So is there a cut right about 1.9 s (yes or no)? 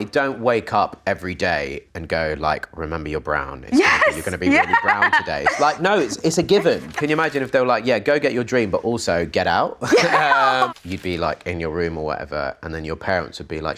yes